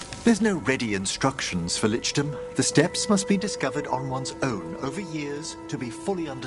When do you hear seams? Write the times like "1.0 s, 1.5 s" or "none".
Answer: none